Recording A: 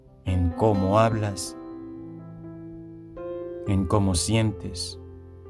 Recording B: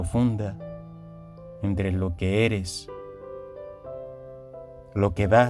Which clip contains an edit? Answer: A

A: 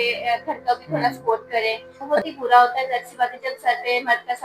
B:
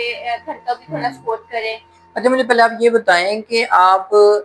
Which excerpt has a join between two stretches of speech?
A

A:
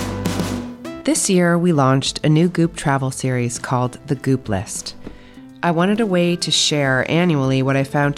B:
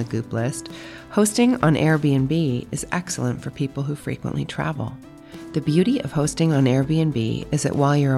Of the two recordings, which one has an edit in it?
A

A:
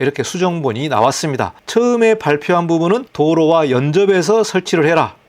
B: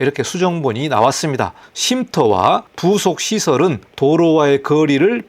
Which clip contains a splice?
B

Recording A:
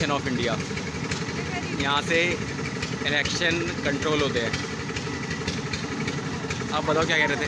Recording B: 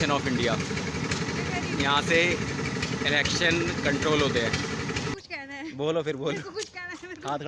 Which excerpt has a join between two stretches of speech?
B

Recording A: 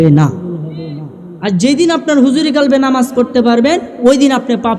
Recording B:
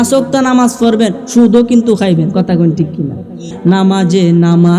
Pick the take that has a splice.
B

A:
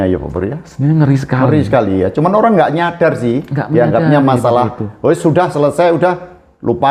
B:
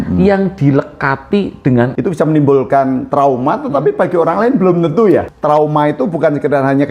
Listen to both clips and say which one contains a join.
B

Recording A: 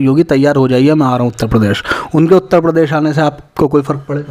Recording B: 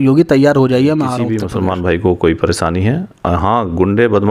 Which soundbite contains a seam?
B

